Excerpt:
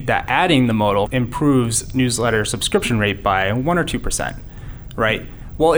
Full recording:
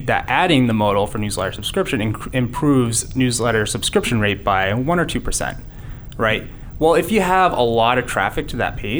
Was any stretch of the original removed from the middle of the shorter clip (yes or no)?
yes